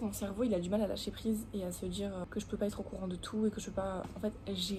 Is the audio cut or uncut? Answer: uncut